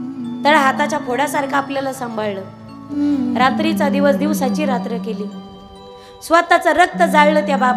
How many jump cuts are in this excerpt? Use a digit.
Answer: 1